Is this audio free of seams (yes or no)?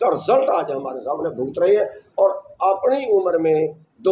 yes